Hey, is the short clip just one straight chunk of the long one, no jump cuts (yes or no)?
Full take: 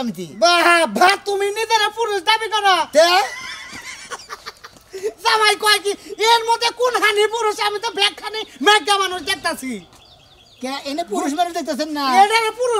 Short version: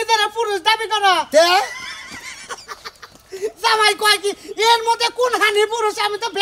yes